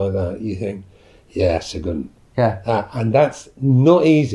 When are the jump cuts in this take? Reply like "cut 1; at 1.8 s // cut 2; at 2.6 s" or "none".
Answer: none